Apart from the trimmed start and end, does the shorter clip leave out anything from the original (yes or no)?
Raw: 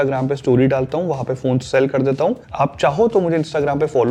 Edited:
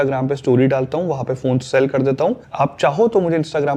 no